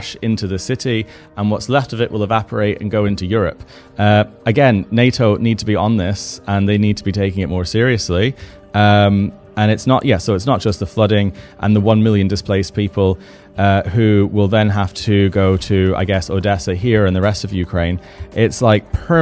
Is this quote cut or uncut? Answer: uncut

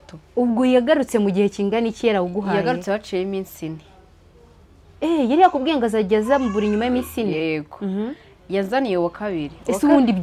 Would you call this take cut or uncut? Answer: uncut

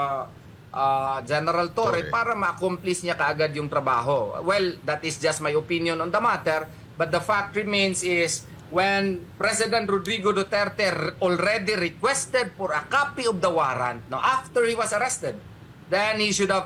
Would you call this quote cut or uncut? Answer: uncut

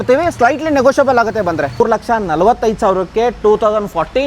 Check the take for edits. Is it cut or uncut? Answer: cut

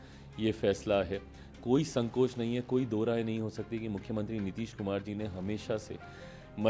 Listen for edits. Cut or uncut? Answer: cut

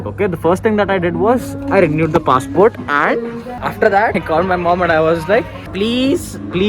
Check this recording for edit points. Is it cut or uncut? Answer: cut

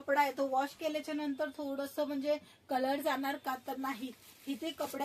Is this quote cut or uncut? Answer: uncut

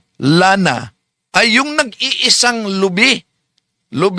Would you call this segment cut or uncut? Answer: uncut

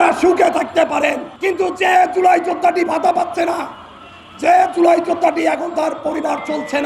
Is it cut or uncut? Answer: cut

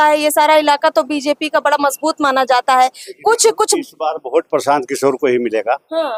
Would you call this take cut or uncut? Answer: uncut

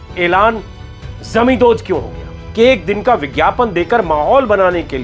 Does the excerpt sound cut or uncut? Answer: cut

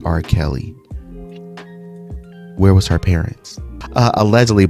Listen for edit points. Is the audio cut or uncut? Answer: cut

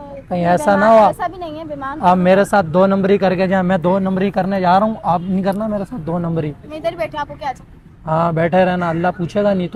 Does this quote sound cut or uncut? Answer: uncut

